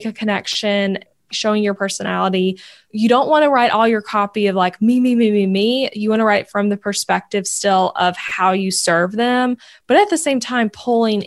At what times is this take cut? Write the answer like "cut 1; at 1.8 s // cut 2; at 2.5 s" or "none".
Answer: cut 1; at 1.1 s // cut 2; at 2.9 s